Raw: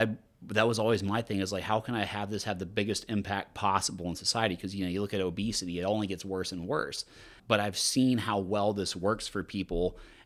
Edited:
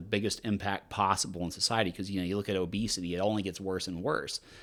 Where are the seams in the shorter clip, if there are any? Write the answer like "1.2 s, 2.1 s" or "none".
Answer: none